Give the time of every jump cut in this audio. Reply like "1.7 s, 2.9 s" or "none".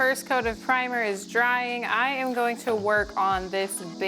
none